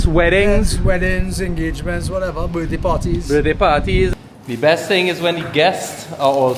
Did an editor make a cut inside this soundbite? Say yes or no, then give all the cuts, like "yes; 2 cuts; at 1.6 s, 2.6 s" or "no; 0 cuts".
yes; 1 cut; at 4.1 s